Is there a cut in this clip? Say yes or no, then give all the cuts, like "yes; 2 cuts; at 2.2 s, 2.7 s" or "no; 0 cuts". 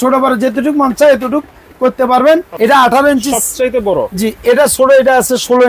yes; 1 cut; at 2.5 s